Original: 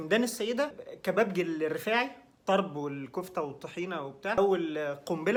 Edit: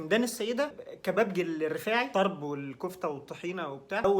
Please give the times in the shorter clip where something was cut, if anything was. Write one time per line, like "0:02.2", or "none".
0:02.1